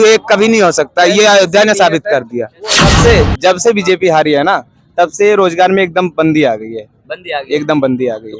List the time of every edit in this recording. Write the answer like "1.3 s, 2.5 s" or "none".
2.9 s